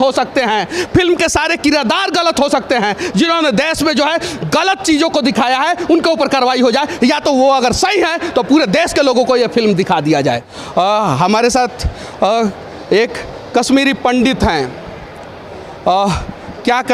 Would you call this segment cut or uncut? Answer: cut